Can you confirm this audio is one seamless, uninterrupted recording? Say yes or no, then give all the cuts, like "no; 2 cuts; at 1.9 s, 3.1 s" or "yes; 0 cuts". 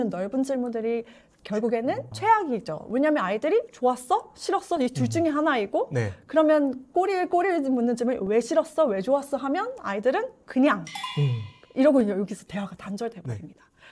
yes; 0 cuts